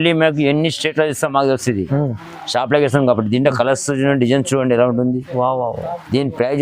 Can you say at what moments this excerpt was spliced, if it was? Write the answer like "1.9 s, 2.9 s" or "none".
none